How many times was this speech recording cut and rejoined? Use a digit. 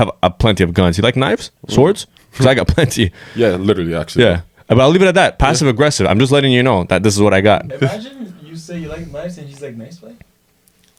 0